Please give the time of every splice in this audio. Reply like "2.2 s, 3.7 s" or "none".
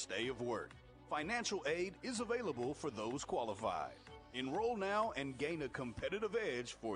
none